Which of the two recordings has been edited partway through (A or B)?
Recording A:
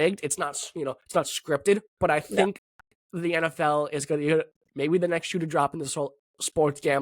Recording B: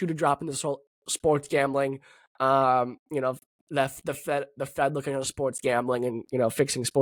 A